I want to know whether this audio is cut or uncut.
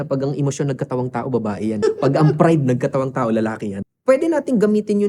cut